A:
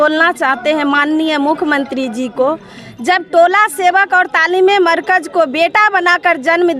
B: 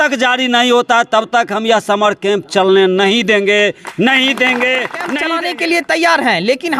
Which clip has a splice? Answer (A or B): B